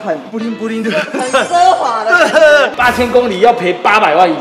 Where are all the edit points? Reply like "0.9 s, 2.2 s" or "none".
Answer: 2.7 s